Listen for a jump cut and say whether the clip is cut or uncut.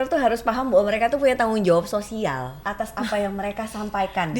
cut